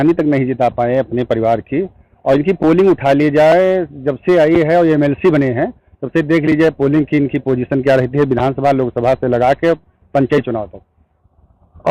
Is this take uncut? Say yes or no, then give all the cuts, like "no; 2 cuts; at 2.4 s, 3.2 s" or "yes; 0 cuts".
yes; 0 cuts